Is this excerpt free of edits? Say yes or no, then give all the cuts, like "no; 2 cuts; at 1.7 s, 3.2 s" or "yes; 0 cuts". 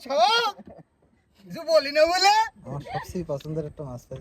no; 1 cut; at 3.1 s